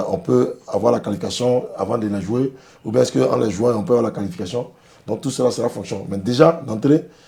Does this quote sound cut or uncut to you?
uncut